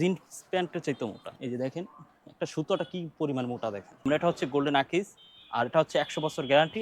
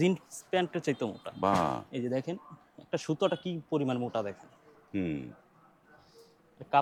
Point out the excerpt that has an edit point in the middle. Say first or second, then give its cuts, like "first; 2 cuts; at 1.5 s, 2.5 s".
first; 2 cuts; at 1.3 s, 4.0 s